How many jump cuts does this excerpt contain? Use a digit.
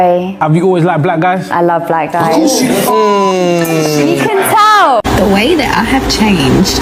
1